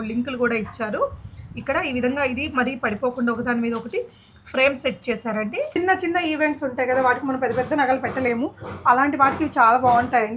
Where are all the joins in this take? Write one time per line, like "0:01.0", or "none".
0:05.8